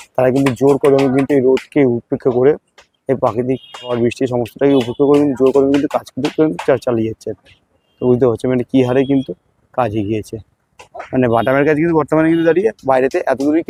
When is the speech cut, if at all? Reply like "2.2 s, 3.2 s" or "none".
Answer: none